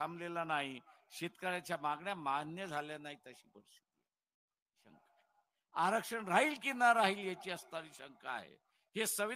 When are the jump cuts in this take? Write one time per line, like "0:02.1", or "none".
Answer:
0:04.9